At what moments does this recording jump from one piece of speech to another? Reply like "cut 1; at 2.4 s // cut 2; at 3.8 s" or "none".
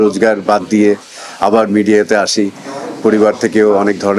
none